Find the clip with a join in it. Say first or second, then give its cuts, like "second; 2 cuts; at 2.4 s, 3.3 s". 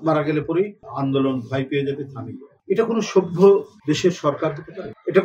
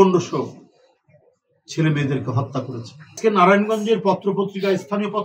second; 1 cut; at 3.2 s